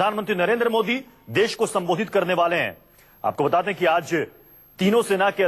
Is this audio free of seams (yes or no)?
no